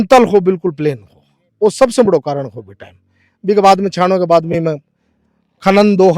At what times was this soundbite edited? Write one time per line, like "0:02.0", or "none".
none

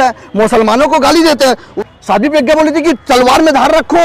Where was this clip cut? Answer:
0:01.7

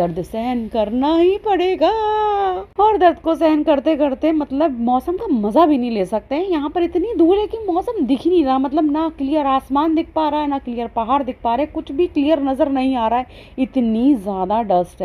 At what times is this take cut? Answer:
none

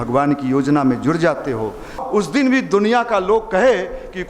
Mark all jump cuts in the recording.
0:02.0

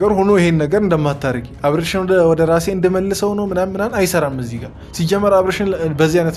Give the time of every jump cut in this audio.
none

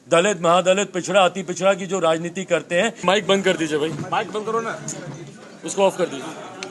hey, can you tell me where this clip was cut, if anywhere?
0:03.0

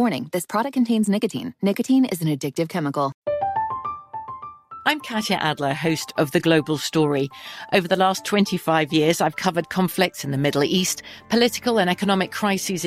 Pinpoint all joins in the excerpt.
0:03.2

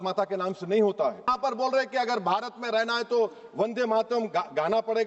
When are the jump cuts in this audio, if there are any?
0:01.2

